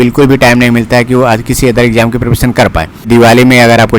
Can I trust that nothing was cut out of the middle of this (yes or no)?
no